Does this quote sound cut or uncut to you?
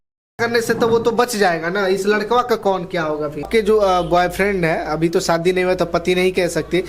cut